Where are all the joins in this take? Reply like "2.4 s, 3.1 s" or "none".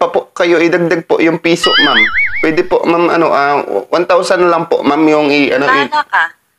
none